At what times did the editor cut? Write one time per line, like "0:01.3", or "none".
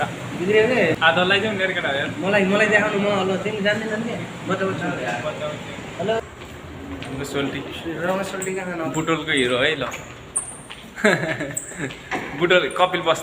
0:01.0
0:06.2